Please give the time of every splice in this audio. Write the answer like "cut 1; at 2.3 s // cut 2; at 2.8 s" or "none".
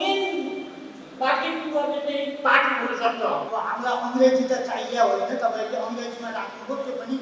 cut 1; at 3.5 s